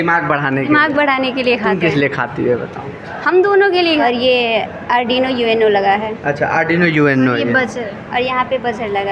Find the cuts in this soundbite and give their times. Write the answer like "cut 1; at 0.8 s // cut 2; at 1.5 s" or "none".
cut 1; at 4.0 s